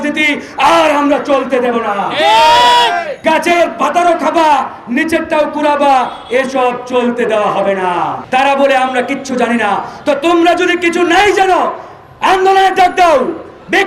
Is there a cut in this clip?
yes; 2 cuts; at 3.1 s, 8.2 s

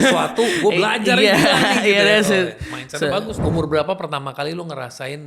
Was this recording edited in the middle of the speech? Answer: yes; 1 cut; at 3.3 s

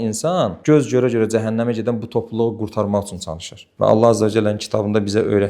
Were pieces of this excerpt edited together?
yes; 1 cut; at 3.7 s

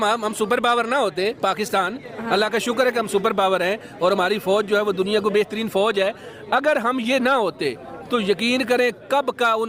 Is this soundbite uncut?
yes; 0 cuts

